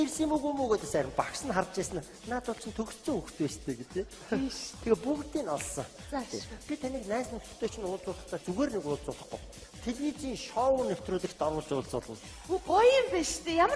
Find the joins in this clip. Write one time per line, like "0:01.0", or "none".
0:11.6